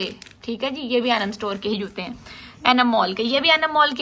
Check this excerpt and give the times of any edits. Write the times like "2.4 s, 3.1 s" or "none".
none